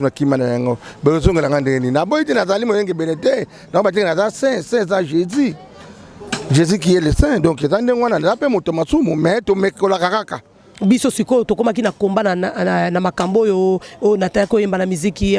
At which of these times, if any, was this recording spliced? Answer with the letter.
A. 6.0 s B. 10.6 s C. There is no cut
B